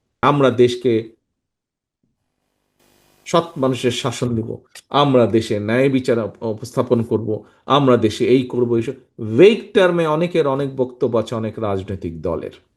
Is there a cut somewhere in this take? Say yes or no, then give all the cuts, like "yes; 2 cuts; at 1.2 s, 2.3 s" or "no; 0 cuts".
no; 0 cuts